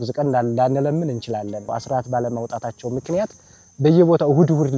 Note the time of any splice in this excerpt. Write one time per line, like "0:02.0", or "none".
0:01.7